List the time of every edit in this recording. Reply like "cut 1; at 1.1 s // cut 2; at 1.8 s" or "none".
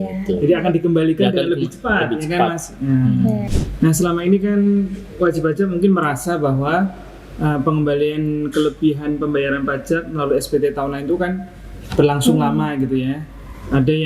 cut 1; at 3.5 s